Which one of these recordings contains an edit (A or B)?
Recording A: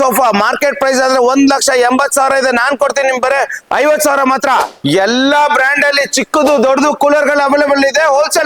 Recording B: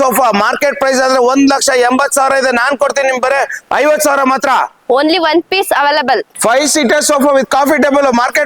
A